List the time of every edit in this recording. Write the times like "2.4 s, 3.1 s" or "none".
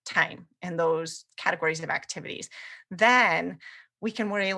none